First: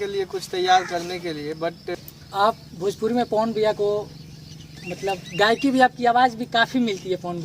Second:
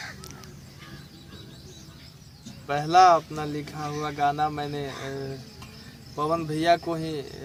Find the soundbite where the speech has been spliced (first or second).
first